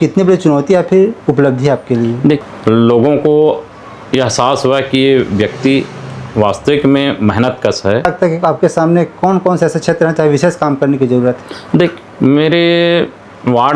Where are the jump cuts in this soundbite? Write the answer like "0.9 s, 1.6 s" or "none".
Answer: 2.4 s, 8.0 s